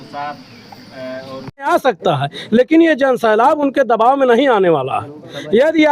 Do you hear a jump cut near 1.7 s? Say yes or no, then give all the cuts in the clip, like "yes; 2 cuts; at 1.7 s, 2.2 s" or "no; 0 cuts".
yes; 1 cut; at 1.7 s